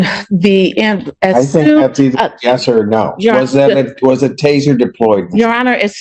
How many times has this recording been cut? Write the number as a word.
zero